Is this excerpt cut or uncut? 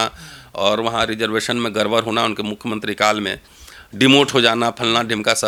uncut